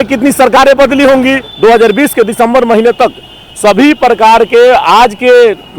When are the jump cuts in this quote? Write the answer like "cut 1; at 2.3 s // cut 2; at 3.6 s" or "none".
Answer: cut 1; at 1.5 s